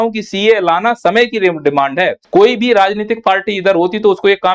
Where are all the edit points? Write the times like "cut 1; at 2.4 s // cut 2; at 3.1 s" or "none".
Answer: cut 1; at 2.2 s